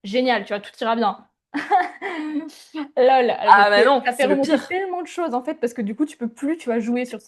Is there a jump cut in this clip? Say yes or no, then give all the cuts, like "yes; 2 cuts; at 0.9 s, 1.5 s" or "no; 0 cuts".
no; 0 cuts